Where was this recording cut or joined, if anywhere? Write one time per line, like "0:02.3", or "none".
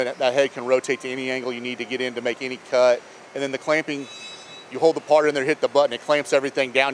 0:03.2
0:04.6